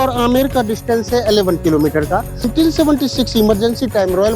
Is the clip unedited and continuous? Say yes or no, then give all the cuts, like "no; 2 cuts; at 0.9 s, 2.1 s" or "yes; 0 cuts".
no; 1 cut; at 2.5 s